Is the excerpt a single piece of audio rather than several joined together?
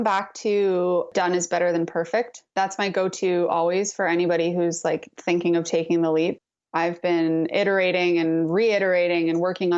no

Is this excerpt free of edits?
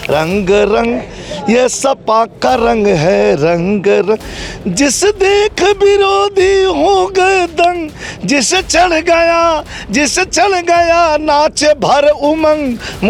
yes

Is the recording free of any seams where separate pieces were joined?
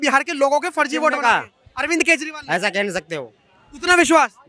yes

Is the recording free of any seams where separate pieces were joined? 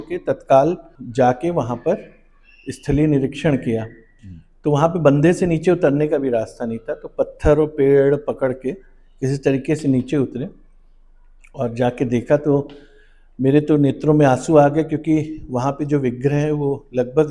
yes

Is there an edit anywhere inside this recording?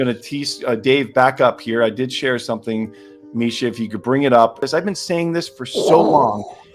yes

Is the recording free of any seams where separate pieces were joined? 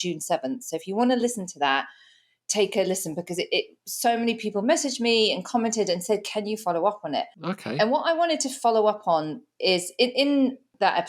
yes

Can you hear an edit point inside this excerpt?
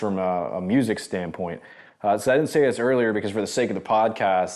no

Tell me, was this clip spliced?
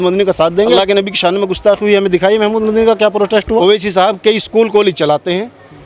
yes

